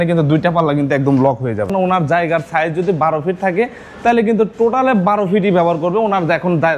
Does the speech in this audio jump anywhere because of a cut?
yes; 1 cut; at 1.7 s

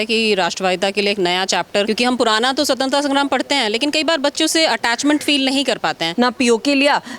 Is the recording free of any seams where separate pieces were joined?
no; 2 cuts; at 1.9 s, 6.0 s

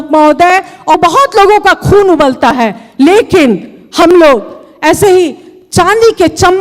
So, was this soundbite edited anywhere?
yes; 1 cut; at 1.0 s

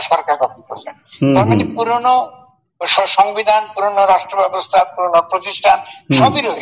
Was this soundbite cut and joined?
no; 0 cuts

